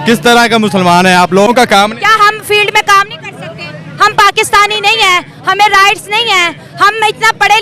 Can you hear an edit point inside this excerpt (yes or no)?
yes